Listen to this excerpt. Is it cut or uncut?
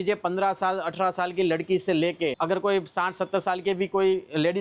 uncut